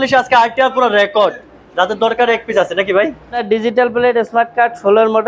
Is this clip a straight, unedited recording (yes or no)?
no